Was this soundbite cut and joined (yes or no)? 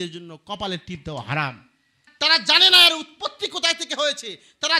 no